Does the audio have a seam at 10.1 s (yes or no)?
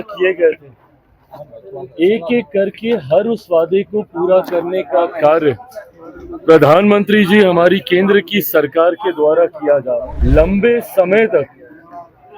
yes